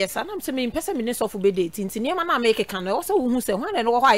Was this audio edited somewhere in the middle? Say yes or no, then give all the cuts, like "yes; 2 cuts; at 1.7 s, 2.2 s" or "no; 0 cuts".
no; 0 cuts